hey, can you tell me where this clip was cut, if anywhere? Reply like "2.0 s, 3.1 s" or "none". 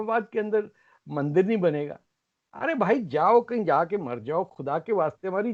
none